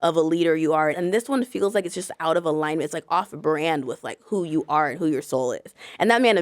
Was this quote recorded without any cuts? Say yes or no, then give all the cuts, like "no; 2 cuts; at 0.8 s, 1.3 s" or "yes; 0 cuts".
no; 1 cut; at 1.0 s